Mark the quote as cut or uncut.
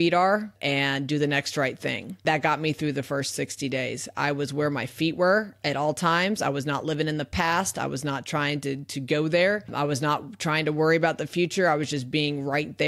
cut